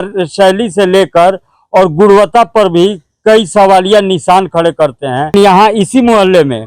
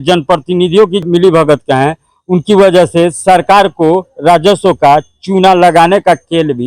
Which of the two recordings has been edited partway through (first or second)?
first